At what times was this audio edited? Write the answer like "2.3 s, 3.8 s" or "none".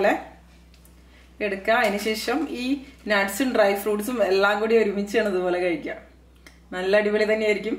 none